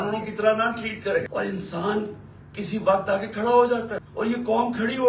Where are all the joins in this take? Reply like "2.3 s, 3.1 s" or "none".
1.3 s, 4.0 s